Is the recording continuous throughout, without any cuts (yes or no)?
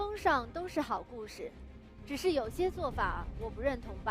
yes